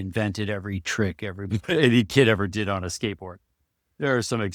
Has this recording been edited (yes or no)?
no